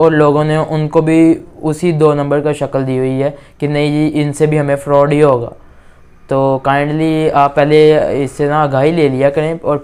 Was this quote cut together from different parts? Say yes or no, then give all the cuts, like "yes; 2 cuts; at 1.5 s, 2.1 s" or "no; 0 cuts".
no; 0 cuts